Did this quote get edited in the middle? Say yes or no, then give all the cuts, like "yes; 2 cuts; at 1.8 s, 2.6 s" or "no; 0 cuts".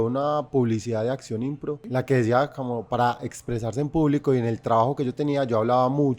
yes; 1 cut; at 1.8 s